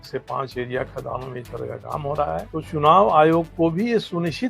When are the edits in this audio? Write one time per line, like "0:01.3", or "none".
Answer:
0:02.5